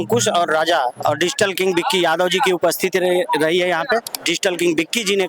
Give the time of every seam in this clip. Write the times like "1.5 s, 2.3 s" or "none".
4.1 s